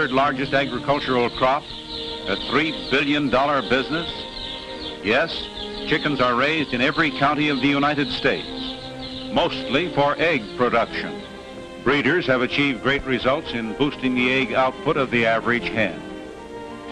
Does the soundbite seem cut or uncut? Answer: uncut